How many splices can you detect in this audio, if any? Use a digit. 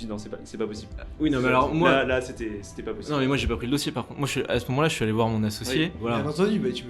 1